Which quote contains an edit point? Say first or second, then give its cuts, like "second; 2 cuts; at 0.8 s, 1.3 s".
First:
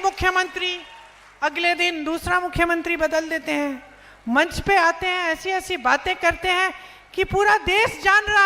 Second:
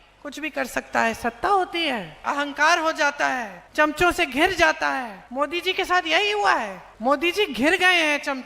second; 4 cuts; at 2.2 s, 3.6 s, 5.2 s, 6.8 s